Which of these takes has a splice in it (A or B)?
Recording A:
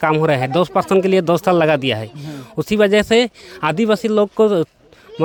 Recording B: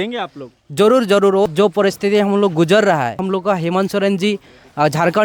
B